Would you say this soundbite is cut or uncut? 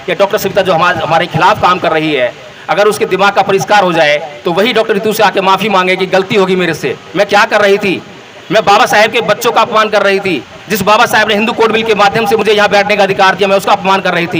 uncut